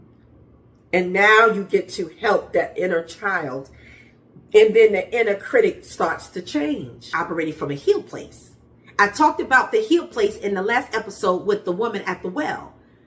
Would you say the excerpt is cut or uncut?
cut